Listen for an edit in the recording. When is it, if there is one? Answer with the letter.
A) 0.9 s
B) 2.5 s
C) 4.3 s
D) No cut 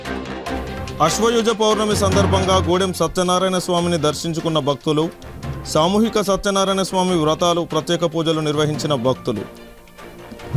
A